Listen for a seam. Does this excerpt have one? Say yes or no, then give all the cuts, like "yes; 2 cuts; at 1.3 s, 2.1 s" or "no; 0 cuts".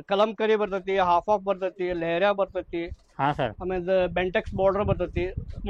no; 0 cuts